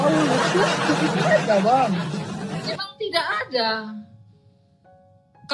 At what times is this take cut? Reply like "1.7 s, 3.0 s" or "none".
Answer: none